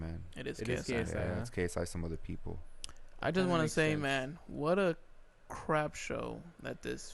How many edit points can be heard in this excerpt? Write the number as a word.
zero